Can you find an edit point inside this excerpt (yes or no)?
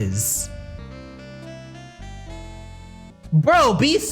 yes